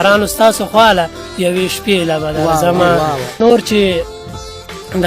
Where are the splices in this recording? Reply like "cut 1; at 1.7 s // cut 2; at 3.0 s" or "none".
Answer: cut 1; at 3.4 s